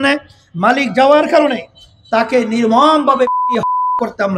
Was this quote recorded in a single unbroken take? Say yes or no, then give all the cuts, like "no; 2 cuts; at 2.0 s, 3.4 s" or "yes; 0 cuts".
yes; 0 cuts